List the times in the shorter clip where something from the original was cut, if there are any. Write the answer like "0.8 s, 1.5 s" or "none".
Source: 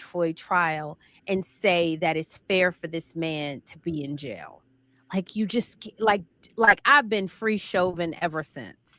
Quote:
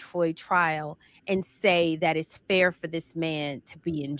none